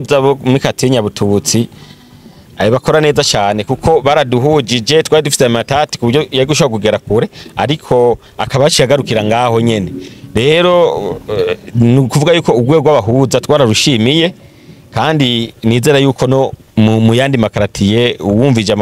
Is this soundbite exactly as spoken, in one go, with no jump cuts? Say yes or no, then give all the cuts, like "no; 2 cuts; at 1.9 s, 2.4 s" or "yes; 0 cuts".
yes; 0 cuts